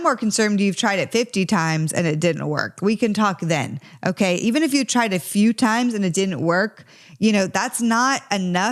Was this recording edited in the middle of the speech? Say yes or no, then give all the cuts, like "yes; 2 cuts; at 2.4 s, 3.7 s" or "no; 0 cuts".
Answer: no; 0 cuts